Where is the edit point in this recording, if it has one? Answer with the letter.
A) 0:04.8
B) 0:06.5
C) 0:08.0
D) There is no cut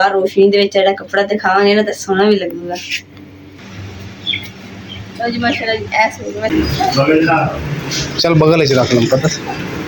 B